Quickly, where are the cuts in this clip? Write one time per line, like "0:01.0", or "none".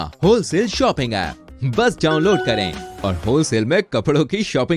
none